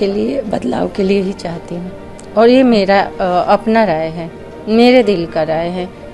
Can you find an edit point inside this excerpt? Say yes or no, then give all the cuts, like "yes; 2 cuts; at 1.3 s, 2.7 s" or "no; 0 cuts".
no; 0 cuts